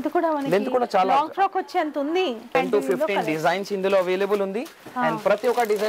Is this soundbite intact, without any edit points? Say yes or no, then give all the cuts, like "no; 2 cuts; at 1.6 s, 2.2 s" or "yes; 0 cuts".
no; 1 cut; at 2.4 s